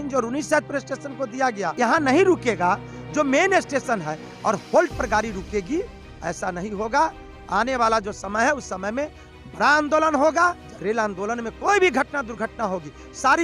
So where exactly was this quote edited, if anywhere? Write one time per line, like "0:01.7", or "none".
0:01.8
0:10.7